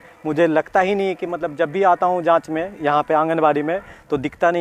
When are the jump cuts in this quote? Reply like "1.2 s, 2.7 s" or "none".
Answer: none

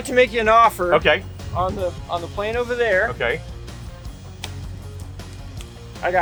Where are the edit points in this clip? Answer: none

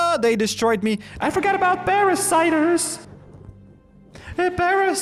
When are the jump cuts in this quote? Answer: none

